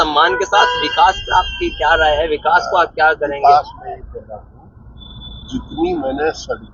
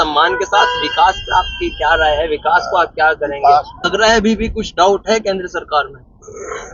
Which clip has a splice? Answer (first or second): second